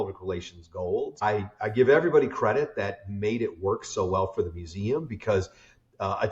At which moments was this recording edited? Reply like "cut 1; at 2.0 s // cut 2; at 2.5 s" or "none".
cut 1; at 1.2 s